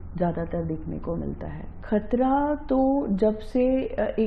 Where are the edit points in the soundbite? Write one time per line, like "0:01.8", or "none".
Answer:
0:01.8